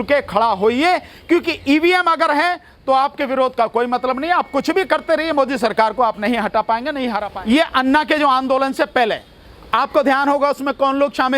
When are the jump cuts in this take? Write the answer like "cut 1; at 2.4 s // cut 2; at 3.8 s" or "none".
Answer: cut 1; at 7.2 s